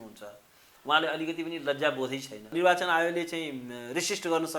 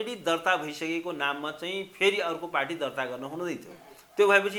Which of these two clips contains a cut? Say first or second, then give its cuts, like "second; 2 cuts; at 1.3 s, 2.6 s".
first; 1 cut; at 2.5 s